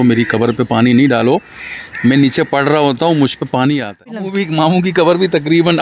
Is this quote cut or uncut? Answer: cut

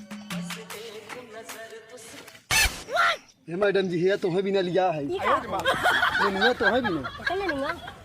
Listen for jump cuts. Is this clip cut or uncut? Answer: uncut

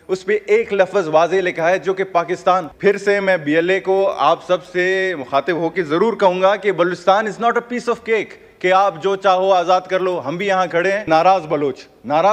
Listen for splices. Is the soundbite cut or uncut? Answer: cut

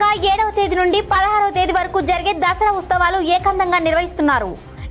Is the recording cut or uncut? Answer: uncut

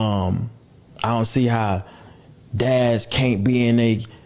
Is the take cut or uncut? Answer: uncut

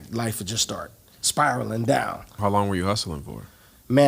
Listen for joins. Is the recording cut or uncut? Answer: cut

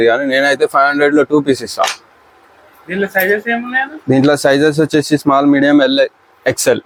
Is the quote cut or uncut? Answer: uncut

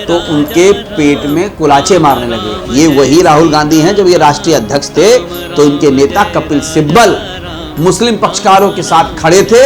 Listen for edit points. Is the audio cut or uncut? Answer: cut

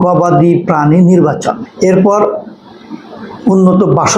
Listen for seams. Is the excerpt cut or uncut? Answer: cut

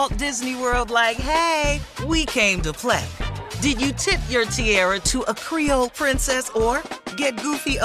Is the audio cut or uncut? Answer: uncut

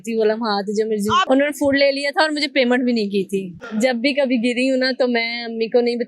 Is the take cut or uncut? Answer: cut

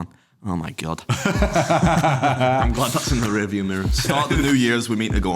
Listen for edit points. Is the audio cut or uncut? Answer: cut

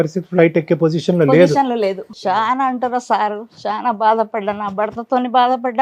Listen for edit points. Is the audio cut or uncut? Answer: cut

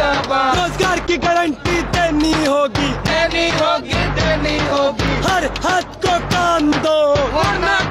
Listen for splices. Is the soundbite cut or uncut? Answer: uncut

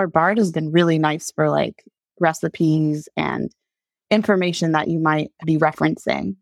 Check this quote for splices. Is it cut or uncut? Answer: cut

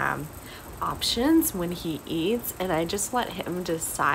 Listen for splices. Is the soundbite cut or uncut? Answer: uncut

